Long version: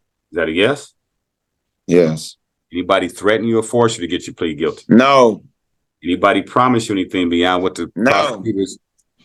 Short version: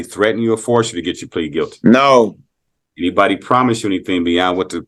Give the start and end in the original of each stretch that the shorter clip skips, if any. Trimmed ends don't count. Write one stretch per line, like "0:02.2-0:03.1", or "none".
none

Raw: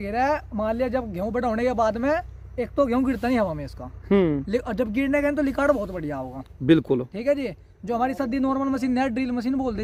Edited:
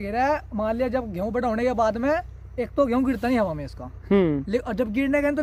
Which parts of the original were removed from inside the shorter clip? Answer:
none

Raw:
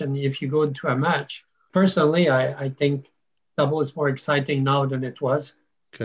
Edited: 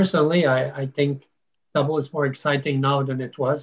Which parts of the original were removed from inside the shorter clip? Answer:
none

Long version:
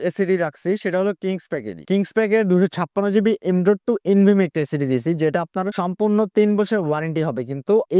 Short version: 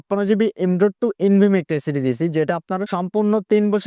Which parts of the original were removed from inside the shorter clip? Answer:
none

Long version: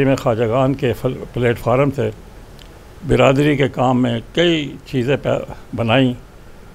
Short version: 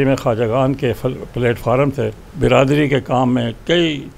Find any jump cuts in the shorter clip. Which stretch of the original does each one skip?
0:02.2-0:02.9

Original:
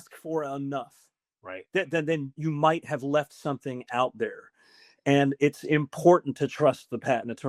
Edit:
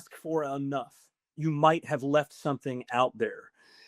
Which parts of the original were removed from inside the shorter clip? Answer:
0:01.3-0:02.3

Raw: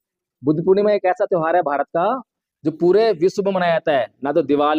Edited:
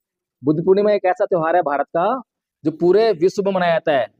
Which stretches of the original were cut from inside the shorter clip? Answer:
none

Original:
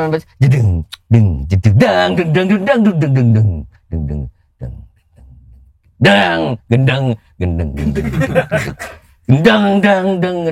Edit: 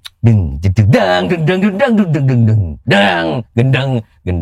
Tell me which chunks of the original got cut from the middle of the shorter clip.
0:03.6-0:05.8

